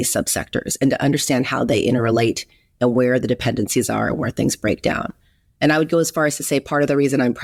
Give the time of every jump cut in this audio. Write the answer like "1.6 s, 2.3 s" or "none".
none

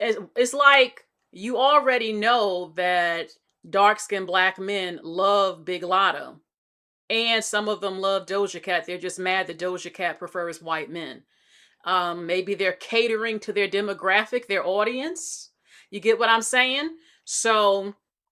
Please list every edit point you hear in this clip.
none

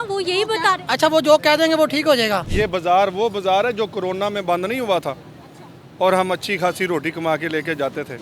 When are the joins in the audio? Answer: 2.5 s

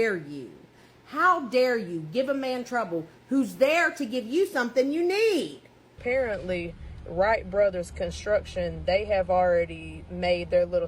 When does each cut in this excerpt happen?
6.0 s

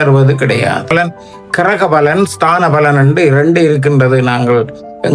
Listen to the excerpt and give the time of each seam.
0.9 s

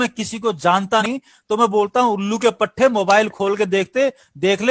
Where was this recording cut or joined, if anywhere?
1.1 s

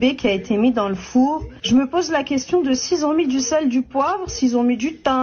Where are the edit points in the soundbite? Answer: 1.5 s

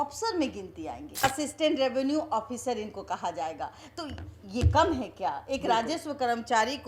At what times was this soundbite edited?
1.2 s

